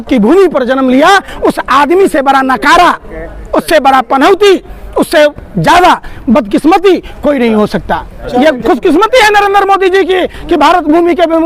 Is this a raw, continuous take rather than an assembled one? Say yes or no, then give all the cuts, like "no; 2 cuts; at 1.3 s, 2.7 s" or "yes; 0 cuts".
yes; 0 cuts